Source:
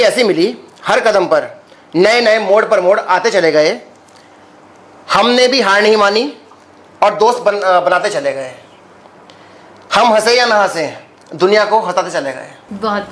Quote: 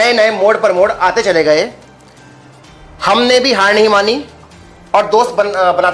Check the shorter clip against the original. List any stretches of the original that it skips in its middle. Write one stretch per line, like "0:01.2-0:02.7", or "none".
none